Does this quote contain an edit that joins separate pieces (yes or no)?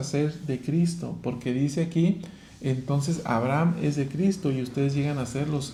no